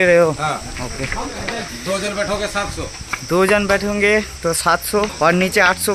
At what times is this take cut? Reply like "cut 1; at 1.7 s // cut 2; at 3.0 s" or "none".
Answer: cut 1; at 1.7 s // cut 2; at 5.1 s